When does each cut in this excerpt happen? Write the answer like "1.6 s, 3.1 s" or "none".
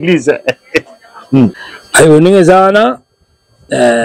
1.6 s